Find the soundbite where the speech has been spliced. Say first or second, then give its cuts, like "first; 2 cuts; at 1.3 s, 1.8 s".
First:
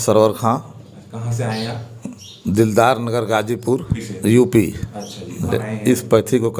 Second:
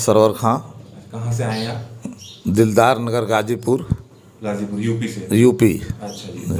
first; 2 cuts; at 4.0 s, 5.5 s